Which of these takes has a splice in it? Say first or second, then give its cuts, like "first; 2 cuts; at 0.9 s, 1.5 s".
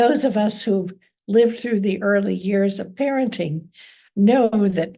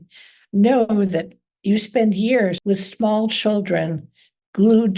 second; 1 cut; at 2.6 s